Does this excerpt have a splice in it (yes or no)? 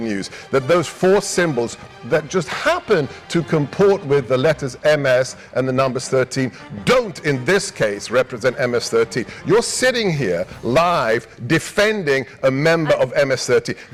no